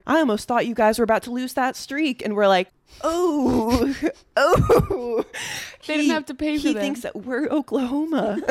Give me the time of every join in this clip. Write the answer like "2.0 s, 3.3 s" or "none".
2.8 s, 5.8 s